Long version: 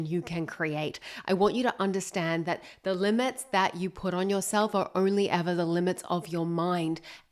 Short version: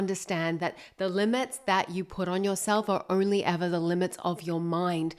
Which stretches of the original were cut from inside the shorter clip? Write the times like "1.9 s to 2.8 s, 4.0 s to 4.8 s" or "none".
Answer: none